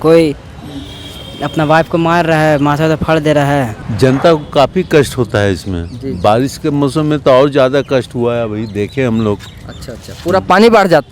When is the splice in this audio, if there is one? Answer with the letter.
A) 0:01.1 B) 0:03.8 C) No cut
B